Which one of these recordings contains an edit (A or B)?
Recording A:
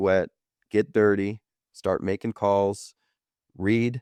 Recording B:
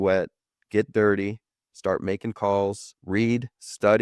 B